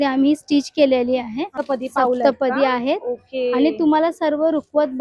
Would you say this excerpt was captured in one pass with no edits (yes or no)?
no